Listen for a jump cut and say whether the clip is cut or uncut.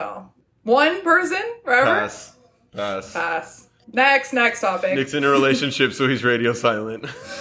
uncut